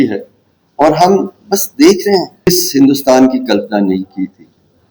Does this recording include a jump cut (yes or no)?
yes